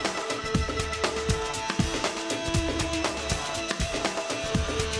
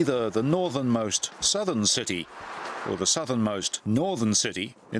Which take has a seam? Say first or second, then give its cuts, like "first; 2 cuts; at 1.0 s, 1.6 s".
second; 1 cut; at 1.5 s